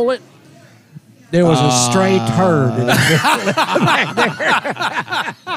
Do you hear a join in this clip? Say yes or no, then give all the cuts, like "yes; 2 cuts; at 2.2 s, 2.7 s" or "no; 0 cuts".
no; 0 cuts